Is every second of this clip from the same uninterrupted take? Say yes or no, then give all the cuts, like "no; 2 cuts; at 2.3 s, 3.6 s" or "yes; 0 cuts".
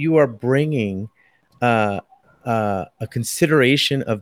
yes; 0 cuts